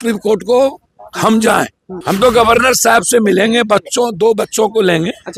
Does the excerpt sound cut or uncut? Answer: cut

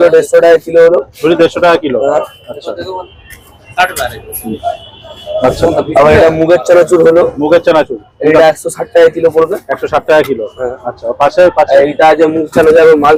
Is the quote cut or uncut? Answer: uncut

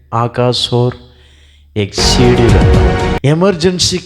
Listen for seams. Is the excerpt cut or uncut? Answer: cut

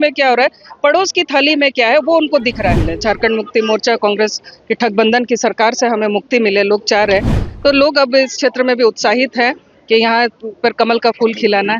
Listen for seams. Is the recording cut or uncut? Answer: cut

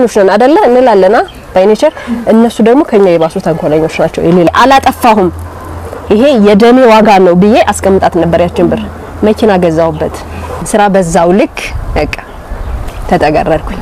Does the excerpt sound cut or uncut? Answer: cut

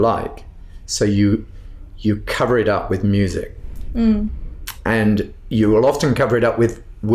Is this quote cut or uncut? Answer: uncut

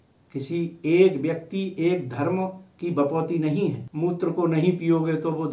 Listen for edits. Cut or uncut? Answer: cut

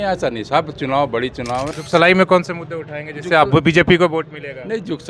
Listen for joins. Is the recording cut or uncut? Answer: cut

